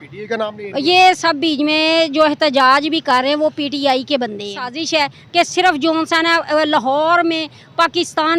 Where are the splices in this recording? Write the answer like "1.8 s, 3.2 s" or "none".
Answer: 4.6 s